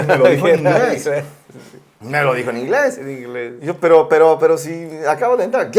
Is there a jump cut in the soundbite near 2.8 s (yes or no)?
no